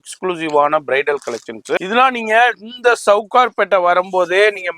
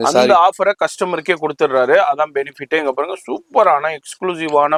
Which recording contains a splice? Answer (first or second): first